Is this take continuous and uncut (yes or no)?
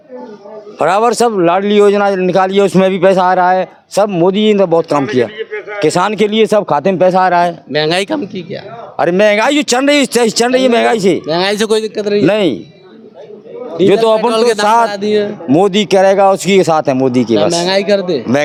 yes